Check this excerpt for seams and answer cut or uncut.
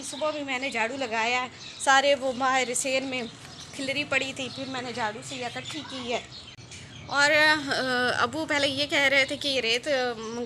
cut